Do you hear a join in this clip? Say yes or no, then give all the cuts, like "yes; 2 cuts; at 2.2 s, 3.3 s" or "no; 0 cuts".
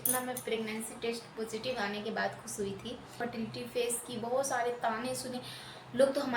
yes; 1 cut; at 3.2 s